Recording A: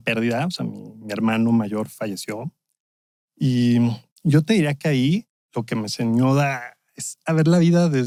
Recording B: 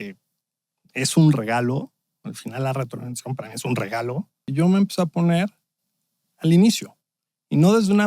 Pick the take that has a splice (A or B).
B